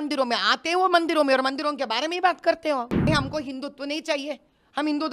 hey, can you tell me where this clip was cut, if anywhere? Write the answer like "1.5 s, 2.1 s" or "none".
3.1 s